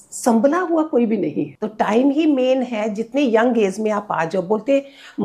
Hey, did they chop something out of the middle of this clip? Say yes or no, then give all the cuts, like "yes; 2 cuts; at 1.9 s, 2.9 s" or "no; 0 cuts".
yes; 1 cut; at 1.6 s